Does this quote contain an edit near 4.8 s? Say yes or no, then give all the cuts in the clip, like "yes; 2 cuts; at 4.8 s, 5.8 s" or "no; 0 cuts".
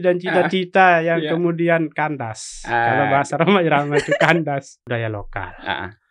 yes; 1 cut; at 4.8 s